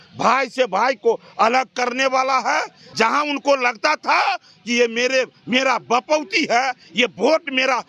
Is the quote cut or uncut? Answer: cut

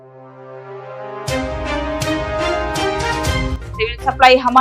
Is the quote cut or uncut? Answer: uncut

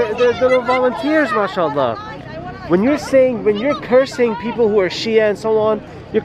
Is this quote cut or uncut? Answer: uncut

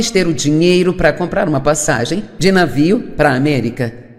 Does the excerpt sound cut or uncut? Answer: uncut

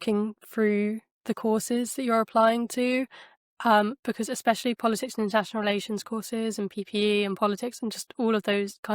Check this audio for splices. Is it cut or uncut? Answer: uncut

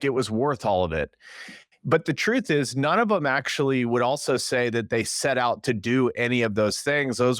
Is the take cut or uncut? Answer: uncut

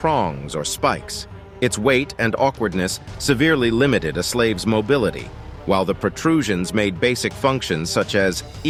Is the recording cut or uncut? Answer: uncut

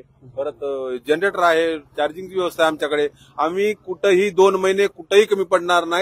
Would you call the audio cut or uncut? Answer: uncut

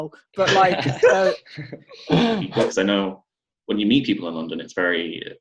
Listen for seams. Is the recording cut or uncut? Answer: cut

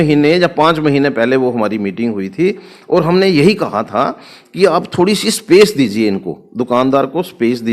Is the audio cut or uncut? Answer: uncut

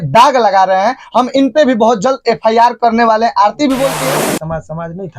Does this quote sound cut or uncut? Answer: cut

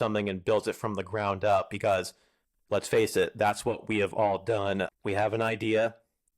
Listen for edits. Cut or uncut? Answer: cut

